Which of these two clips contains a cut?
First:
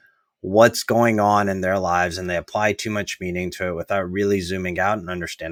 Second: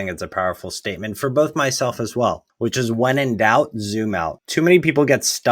second; 2 cuts; at 2.5 s, 4.4 s

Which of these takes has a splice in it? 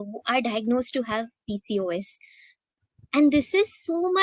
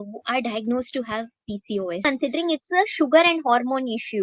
second; 1 cut; at 2.0 s

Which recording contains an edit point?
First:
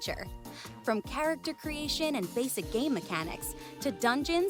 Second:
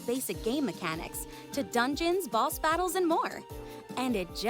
second; 1 cut; at 3.6 s

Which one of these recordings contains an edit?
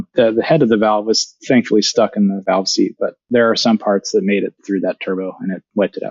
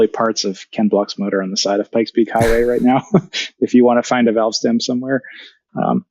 first; 2 cuts; at 3.2 s, 4.6 s

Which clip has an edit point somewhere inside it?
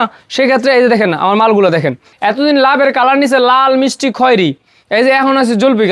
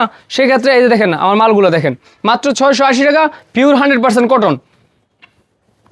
first; 1 cut; at 2.1 s

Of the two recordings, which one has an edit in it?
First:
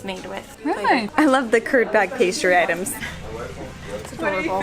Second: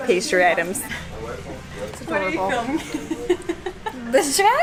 first; 1 cut; at 1.1 s

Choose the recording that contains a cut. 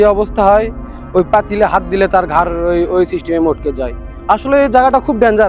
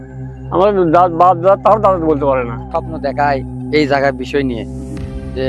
second; 1 cut; at 2.6 s

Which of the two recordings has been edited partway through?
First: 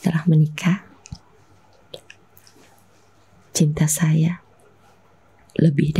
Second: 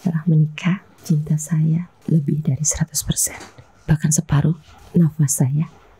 second; 3 cuts; at 0.9 s, 1.9 s, 4.7 s

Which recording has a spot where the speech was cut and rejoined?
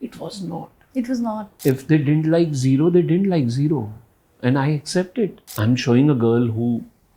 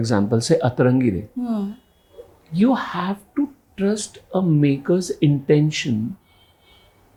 first; 2 cuts; at 1.5 s, 5.4 s

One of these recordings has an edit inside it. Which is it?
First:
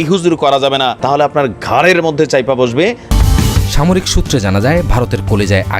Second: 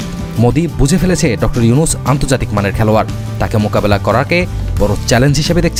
first; 2 cuts; at 1.0 s, 3.1 s

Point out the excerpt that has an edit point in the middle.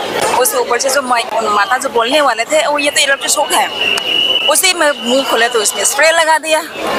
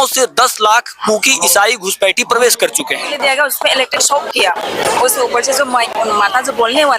second; 1 cut; at 3.1 s

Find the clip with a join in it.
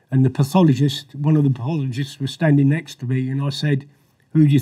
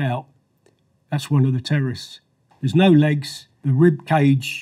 second; 2 cuts; at 2.4 s, 3.6 s

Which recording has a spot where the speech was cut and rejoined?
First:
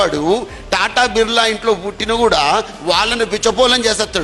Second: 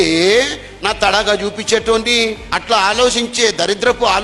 second; 1 cut; at 2.4 s

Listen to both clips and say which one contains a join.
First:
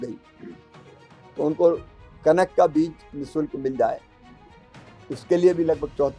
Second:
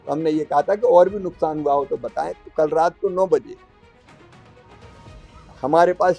second; 2 cuts; at 3.7 s, 5.2 s

